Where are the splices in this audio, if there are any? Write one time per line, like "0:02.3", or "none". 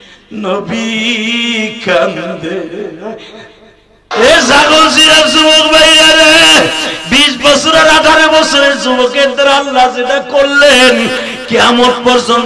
0:04.1